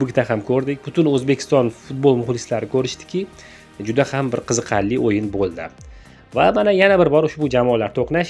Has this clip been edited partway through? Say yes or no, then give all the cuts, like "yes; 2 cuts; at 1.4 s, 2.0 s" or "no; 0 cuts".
no; 0 cuts